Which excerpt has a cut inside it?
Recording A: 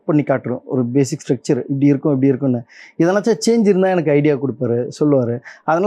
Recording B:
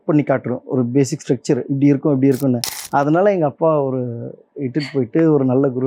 B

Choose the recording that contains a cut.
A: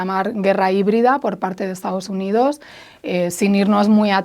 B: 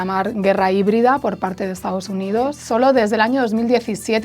B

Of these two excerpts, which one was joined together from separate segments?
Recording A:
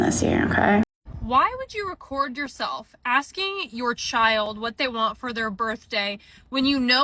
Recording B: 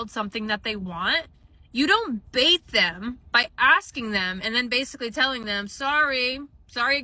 A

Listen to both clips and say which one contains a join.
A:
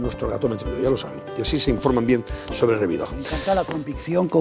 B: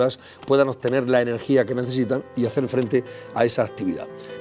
A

